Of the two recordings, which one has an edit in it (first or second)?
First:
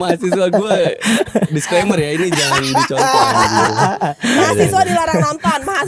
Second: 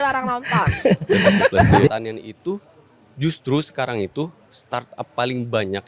second